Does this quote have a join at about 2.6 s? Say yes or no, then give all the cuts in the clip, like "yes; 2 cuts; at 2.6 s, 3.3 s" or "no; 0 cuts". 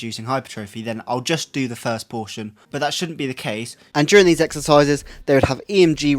yes; 2 cuts; at 2.6 s, 3.7 s